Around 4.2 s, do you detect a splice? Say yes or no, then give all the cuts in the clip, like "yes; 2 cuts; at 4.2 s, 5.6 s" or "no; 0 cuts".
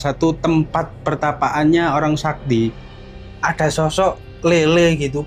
no; 1 cut; at 2.9 s